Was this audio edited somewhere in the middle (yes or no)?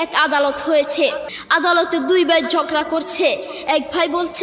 yes